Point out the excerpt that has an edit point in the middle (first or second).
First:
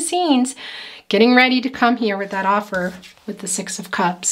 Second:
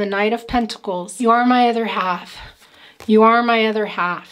second